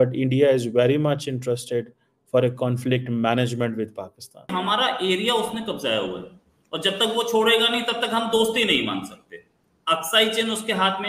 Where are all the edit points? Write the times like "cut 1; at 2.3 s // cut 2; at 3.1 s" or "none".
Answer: cut 1; at 4.5 s

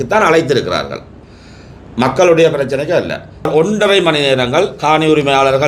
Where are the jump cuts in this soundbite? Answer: cut 1; at 3.5 s

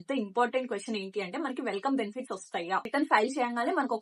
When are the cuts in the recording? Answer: cut 1; at 2.9 s

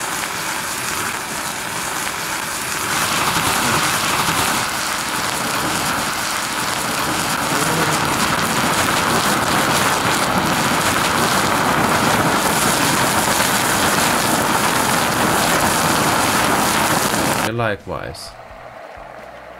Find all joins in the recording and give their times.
none

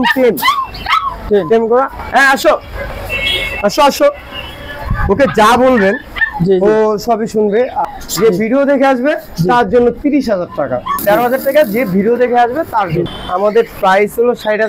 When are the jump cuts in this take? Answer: cut 1; at 7.8 s // cut 2; at 10.9 s // cut 3; at 13.1 s

